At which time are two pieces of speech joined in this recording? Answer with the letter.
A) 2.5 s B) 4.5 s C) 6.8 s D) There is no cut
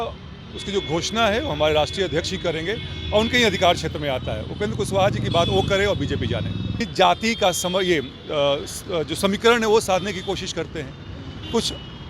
C